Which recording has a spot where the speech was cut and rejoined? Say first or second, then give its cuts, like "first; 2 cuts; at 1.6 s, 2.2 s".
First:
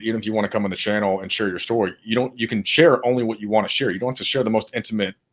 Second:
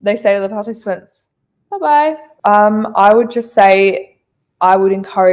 second; 1 cut; at 2.3 s